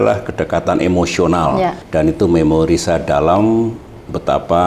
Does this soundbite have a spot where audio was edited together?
yes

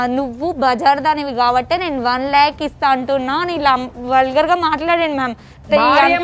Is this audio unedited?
yes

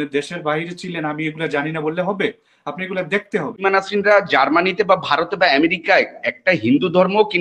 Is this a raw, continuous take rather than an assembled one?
no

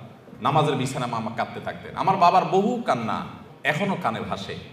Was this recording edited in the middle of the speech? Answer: yes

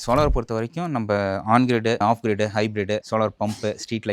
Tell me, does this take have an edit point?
no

